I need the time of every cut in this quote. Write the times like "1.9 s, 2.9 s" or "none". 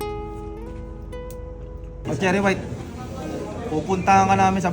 2.0 s